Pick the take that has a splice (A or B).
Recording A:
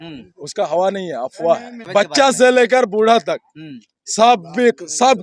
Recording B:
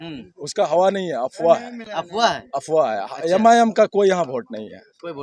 A